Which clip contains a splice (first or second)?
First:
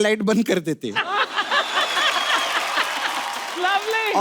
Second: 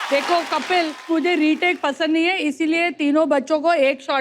second